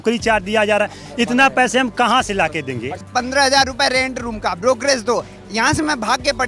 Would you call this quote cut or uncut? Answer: cut